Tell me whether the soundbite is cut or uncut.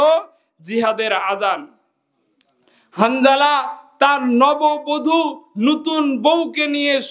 uncut